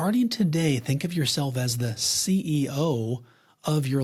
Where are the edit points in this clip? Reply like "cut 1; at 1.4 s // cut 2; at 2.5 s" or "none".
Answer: none